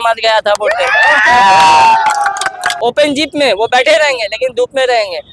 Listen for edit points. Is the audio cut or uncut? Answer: cut